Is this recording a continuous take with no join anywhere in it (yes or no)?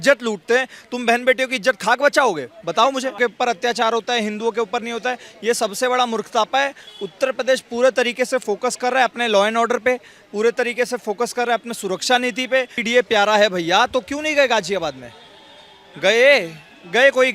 no